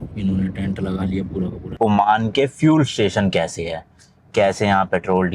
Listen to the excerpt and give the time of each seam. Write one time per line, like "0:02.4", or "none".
0:01.8